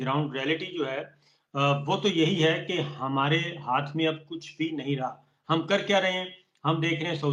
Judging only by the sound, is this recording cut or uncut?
uncut